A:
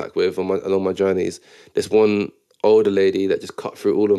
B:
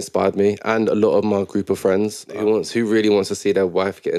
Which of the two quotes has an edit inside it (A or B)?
B